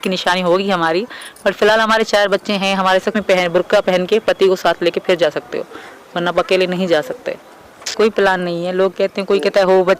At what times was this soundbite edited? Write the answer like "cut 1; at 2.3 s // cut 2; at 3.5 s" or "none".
cut 1; at 3.1 s // cut 2; at 7.9 s